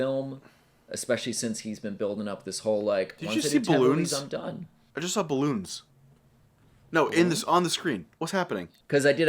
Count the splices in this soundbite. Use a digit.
1